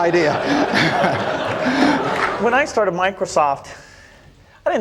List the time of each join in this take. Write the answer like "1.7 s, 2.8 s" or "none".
2.3 s